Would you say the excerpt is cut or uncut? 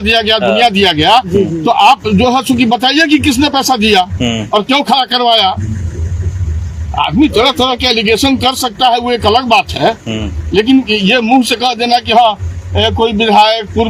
uncut